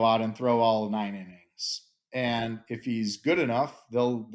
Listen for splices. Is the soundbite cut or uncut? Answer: uncut